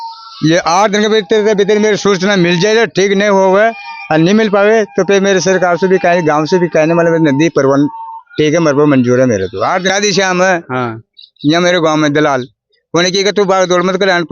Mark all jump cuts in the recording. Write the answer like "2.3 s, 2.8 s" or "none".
9.9 s